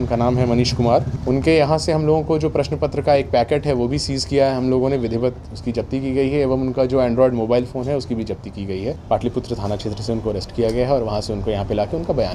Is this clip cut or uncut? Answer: cut